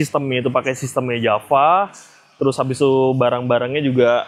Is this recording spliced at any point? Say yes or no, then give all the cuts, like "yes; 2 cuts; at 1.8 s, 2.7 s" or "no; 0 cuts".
no; 0 cuts